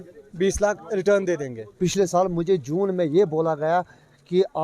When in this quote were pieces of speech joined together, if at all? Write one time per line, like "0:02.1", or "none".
0:01.6